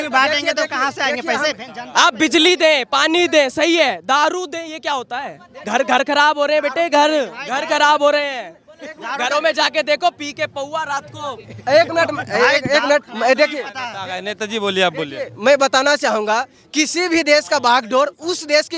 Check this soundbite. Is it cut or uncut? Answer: uncut